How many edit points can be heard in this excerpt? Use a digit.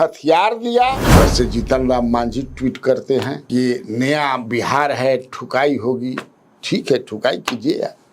1